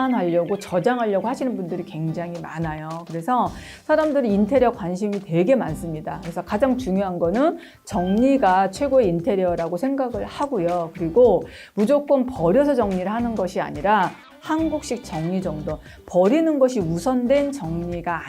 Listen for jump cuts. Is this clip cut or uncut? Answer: cut